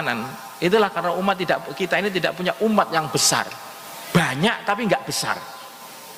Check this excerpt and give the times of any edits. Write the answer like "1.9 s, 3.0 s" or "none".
none